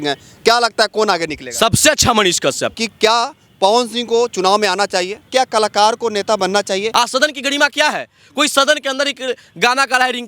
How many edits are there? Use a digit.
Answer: 3